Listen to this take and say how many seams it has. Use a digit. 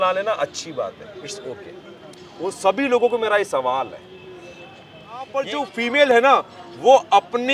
1